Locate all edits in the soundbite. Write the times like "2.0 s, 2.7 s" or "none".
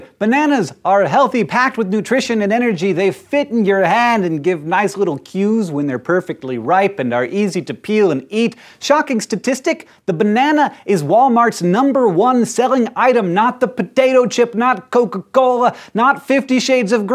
14.6 s